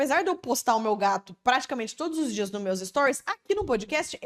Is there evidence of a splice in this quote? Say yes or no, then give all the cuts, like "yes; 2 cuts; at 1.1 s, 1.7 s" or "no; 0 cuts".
no; 0 cuts